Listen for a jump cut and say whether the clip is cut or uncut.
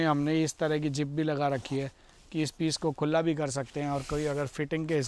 uncut